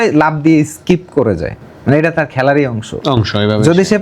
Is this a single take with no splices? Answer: yes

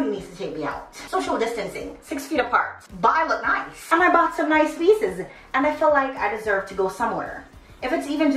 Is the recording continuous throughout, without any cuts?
no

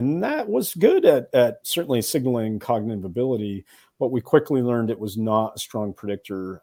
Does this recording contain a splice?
no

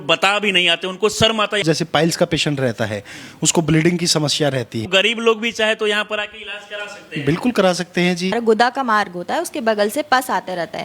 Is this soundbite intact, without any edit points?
no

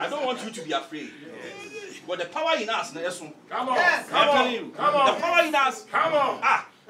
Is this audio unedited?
yes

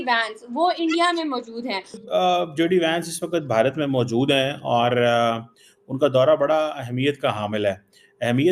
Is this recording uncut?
no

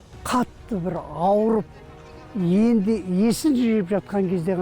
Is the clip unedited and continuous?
yes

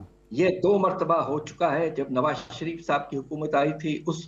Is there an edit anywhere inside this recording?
no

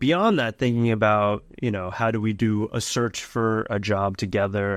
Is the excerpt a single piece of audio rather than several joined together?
yes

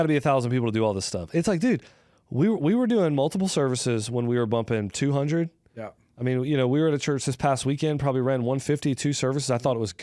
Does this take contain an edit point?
no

